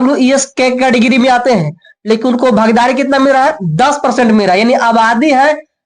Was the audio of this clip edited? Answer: no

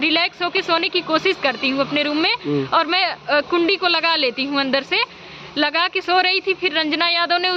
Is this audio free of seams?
yes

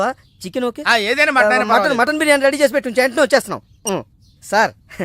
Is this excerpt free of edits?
yes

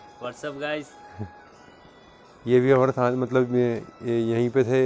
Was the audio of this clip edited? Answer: no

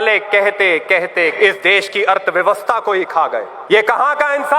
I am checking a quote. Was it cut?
yes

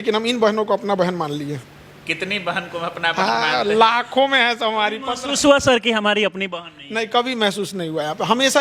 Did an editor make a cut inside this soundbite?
no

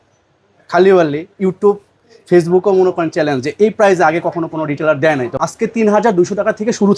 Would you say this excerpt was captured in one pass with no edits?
no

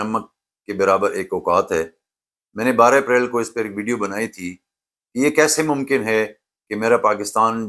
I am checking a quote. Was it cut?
no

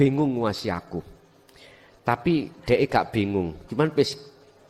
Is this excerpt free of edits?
yes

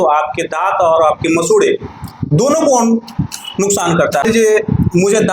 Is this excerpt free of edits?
no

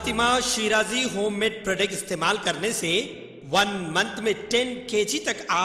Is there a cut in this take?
no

